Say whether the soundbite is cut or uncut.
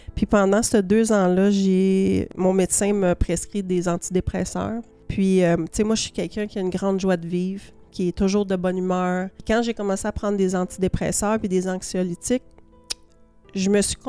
cut